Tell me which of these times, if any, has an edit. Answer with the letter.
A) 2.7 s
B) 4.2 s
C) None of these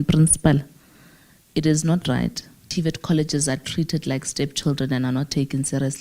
A